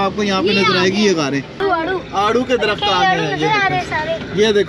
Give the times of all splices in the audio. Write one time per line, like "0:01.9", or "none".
0:01.6